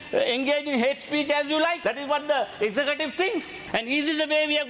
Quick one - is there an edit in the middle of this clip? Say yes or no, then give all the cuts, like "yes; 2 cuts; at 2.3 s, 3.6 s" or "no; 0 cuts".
yes; 2 cuts; at 1.8 s, 3.6 s